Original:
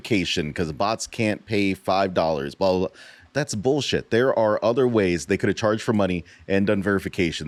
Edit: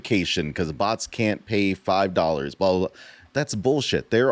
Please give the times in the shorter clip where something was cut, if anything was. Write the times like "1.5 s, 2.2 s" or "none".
none